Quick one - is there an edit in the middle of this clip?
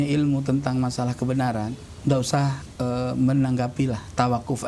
yes; 2 cuts; at 1.9 s, 2.6 s

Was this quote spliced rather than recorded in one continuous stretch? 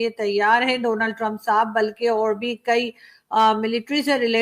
no; 0 cuts

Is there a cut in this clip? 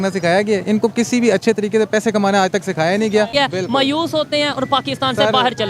yes; 1 cut; at 3.3 s

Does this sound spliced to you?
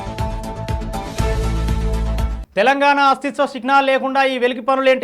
yes; 1 cut; at 2.3 s

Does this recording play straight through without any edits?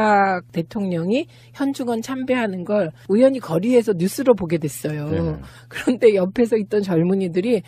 no; 1 cut; at 1.7 s

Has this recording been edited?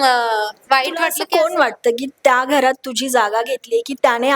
yes; 1 cut; at 1.2 s

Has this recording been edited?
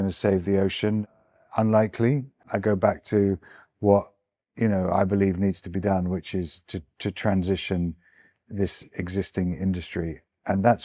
no; 0 cuts

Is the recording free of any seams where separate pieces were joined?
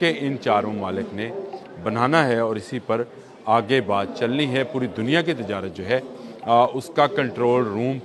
yes; 0 cuts

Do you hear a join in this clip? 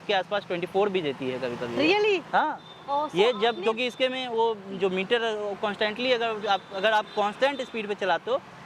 no; 0 cuts

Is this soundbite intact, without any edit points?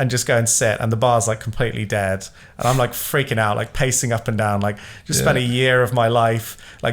yes; 0 cuts

